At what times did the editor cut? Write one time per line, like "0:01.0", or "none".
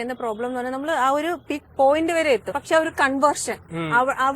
0:01.6
0:02.5